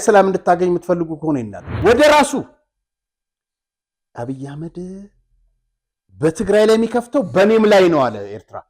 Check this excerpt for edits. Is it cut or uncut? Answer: cut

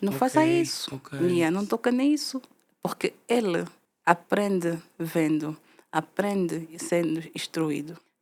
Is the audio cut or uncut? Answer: uncut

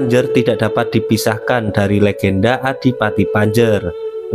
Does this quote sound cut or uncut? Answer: uncut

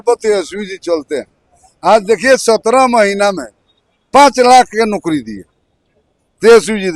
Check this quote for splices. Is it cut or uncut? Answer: uncut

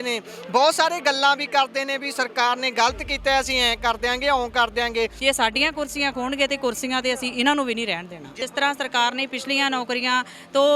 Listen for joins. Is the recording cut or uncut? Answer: cut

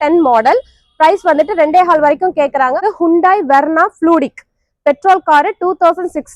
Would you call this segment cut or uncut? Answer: cut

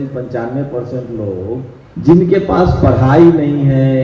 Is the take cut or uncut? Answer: cut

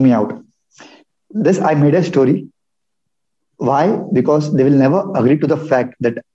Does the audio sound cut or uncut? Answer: uncut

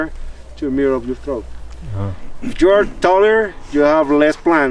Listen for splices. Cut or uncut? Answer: uncut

